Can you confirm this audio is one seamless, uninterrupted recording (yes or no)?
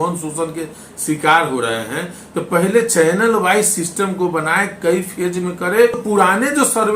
no